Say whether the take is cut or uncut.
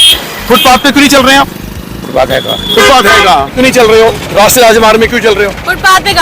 cut